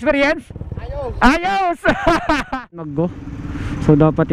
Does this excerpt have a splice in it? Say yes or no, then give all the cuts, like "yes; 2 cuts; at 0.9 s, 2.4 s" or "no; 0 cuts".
yes; 1 cut; at 2.8 s